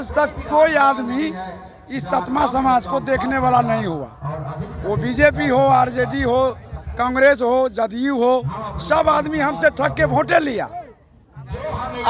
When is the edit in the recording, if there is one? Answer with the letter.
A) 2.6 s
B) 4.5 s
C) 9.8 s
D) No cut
D